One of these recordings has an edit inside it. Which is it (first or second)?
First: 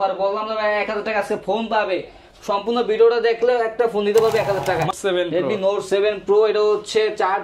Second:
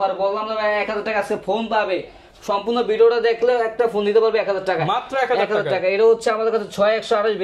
first